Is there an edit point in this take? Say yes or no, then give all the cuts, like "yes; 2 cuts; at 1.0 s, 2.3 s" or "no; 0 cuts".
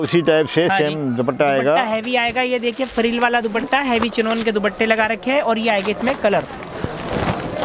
no; 0 cuts